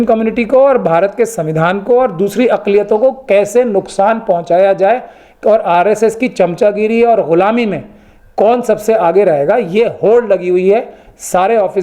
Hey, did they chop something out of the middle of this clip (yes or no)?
no